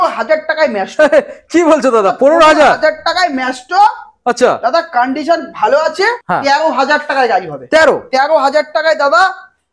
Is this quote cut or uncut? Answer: cut